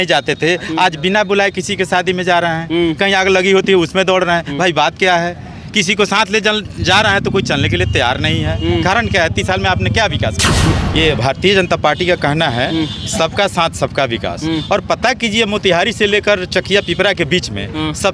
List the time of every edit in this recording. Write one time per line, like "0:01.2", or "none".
0:10.7